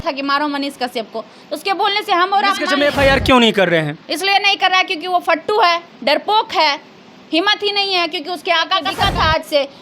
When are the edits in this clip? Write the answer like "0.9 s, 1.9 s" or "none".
2.7 s, 8.9 s